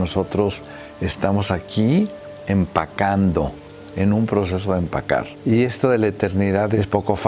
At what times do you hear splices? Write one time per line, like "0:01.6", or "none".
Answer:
none